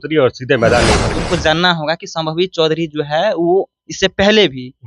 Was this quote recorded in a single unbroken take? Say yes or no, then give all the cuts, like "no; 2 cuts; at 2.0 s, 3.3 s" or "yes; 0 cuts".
no; 1 cut; at 1.1 s